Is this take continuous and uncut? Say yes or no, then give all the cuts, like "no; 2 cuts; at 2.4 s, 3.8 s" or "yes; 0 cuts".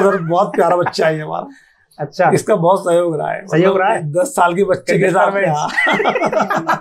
yes; 0 cuts